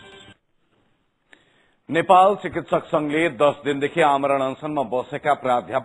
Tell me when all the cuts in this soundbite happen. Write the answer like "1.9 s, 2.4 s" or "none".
2.6 s

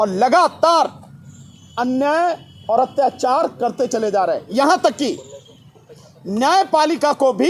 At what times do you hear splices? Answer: none

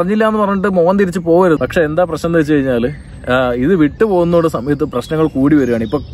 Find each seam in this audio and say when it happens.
1.6 s

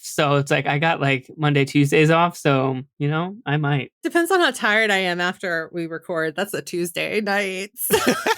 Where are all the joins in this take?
4.0 s

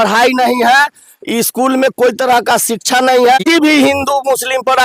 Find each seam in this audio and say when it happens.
3.4 s

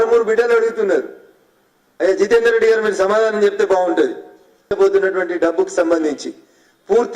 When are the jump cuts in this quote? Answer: 4.7 s

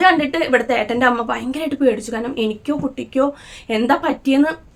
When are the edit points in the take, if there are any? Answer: none

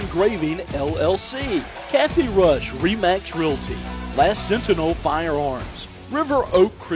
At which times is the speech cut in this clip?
1.8 s

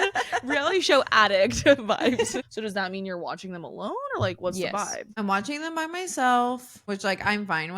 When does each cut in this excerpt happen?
2.4 s, 5.0 s, 6.7 s

